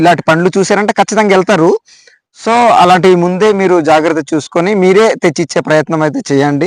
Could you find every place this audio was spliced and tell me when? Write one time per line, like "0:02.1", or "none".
none